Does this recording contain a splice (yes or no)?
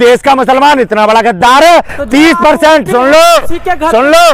no